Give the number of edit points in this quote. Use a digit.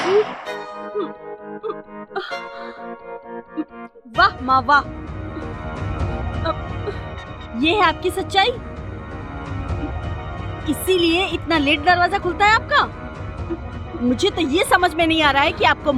0